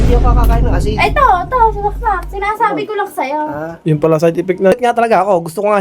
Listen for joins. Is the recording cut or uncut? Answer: cut